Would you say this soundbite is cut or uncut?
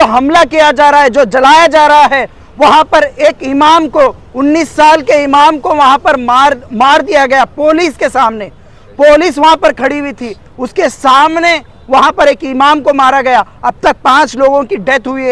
uncut